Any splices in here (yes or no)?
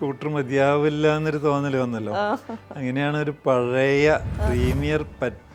no